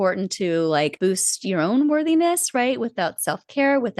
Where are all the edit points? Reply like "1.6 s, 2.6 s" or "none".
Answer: 0.9 s